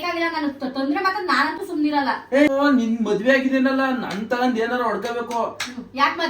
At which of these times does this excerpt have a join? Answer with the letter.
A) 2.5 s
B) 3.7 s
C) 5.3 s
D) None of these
A